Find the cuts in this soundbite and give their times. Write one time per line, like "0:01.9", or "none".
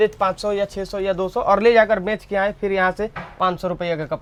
none